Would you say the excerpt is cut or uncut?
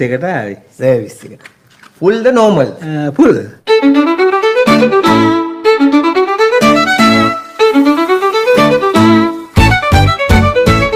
uncut